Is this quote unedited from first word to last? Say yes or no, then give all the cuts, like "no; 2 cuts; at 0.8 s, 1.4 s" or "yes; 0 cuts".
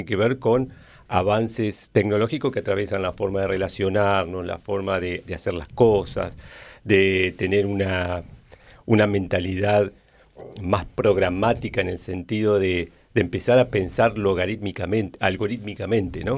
yes; 0 cuts